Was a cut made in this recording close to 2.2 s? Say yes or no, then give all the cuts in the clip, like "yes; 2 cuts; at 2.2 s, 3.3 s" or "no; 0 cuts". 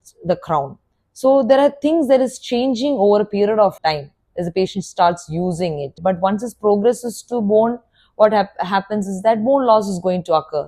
no; 2 cuts; at 3.8 s, 5.9 s